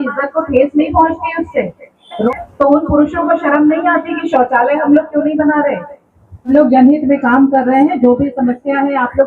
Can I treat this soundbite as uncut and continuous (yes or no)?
no